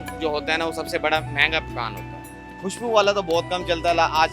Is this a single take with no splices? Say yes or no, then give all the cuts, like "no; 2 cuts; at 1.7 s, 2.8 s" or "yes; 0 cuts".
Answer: yes; 0 cuts